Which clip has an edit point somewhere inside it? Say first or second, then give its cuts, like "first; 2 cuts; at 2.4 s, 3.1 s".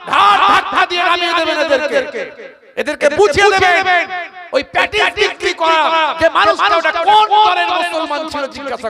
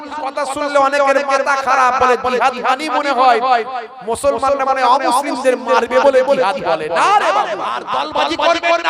second; 1 cut; at 7.9 s